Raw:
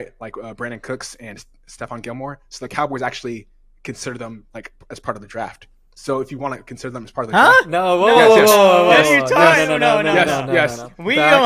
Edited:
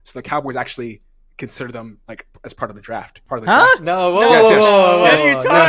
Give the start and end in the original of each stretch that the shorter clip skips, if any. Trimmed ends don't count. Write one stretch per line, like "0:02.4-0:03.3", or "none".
0:05.6-0:07.0